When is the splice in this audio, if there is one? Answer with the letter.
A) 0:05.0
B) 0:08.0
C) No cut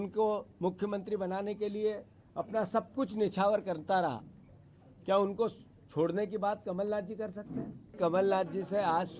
B